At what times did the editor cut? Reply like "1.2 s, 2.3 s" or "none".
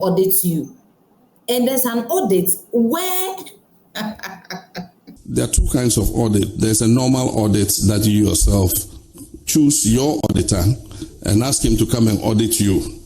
5.0 s